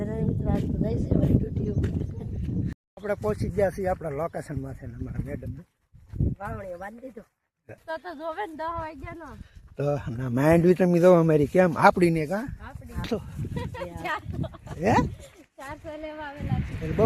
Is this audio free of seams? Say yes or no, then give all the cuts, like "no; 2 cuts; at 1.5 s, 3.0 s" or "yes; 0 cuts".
no; 3 cuts; at 2.8 s, 7.8 s, 13.0 s